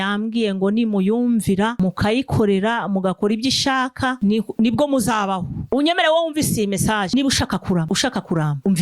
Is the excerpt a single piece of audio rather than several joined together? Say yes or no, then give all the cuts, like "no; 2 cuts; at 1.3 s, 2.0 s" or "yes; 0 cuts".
no; 1 cut; at 5.6 s